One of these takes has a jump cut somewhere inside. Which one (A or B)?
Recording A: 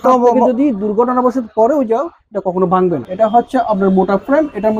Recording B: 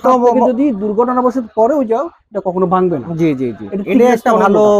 A